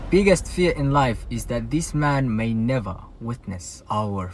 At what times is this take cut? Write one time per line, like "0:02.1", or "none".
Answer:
none